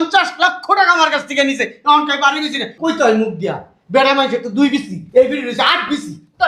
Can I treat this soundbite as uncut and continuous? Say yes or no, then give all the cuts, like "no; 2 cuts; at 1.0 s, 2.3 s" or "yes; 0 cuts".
no; 1 cut; at 2.7 s